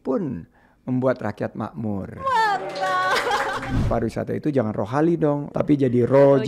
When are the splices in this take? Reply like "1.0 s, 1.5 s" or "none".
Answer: 3.8 s, 5.5 s